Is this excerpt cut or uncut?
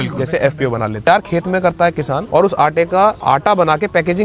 cut